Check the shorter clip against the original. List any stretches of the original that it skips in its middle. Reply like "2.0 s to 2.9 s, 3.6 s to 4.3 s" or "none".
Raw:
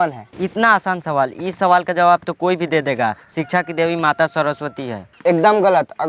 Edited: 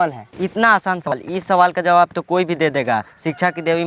1.1 s to 1.2 s